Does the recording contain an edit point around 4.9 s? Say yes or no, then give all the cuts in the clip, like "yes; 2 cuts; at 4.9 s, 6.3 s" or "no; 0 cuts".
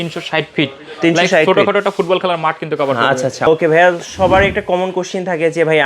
no; 1 cut; at 3.5 s